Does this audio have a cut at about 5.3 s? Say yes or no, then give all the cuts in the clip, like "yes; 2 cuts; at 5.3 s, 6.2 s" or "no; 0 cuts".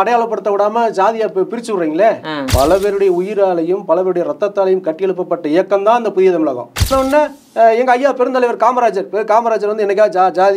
no; 2 cuts; at 2.5 s, 6.9 s